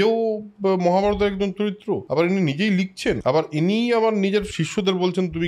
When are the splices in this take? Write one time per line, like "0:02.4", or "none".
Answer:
0:02.0
0:03.2
0:04.5